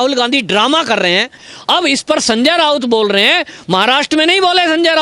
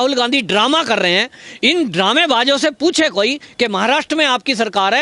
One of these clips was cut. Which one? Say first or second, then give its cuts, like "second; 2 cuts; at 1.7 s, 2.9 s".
first; 1 cut; at 1.5 s